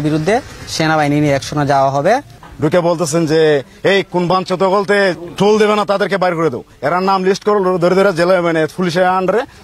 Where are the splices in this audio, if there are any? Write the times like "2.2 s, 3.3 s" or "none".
2.4 s, 5.2 s